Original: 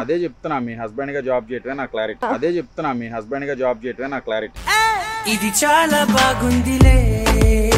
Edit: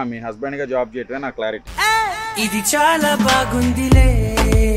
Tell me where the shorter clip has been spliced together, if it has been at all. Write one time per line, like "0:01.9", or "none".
0:01.6